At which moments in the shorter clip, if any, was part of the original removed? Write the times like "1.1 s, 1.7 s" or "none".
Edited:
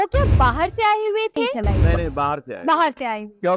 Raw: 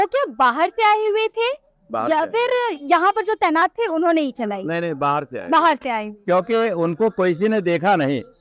1.5 s